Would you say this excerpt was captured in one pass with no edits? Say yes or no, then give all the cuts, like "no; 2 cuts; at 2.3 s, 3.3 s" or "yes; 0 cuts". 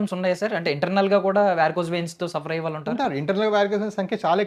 yes; 0 cuts